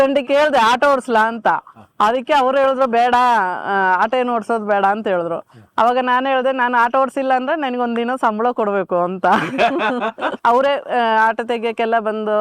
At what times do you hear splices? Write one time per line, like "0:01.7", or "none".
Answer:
0:10.3